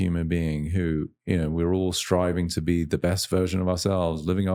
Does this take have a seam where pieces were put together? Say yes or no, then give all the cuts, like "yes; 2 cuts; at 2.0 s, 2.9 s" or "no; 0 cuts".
no; 0 cuts